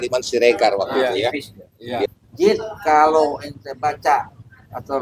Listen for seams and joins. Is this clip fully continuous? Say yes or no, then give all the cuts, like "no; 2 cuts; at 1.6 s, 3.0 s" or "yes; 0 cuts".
no; 1 cut; at 2.1 s